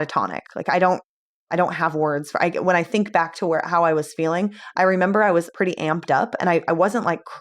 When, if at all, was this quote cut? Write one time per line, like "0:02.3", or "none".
0:05.5